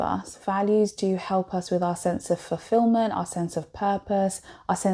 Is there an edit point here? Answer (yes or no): no